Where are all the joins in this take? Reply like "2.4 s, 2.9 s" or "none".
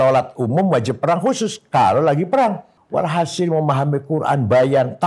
2.7 s

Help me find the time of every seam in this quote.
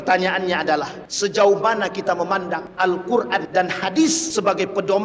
1.0 s, 2.7 s, 3.5 s, 4.2 s

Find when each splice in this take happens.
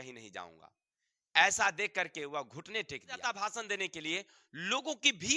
3.4 s

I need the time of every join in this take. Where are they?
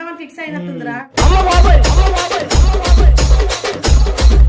1.1 s

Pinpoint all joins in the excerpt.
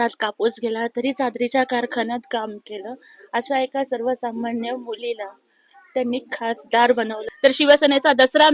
7.2 s

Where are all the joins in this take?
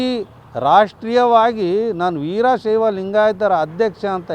none

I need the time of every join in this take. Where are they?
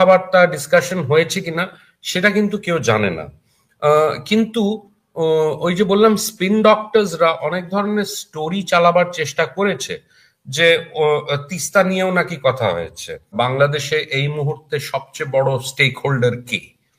13.3 s

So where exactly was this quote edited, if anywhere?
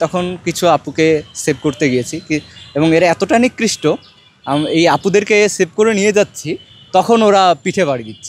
none

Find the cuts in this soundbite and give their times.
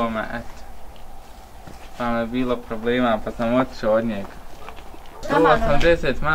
5.2 s

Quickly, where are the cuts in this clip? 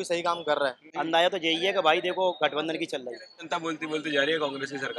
0.9 s, 3.5 s

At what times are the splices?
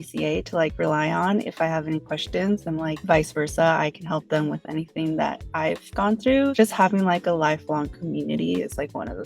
3.0 s, 6.5 s

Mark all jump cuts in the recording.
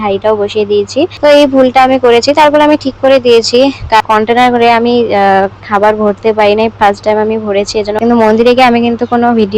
1.1 s, 4.0 s, 8.0 s

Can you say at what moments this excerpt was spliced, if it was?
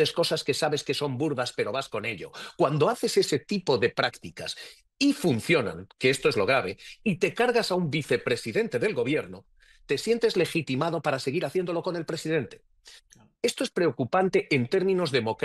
none

